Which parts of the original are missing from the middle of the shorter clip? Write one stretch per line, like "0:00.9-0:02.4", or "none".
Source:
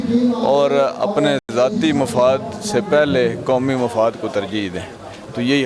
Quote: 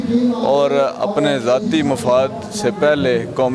0:01.4-0:01.5